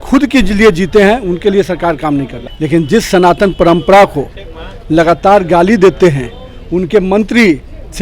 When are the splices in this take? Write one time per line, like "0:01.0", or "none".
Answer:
0:02.4